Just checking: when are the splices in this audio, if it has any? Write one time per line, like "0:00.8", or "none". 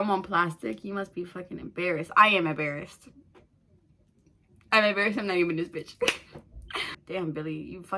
0:07.0